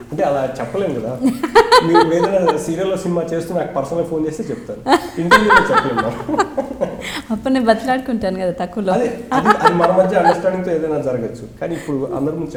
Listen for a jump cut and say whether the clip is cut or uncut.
uncut